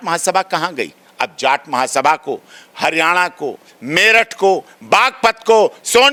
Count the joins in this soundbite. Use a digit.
0